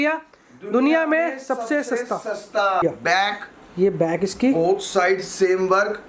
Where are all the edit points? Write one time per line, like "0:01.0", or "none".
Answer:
0:02.8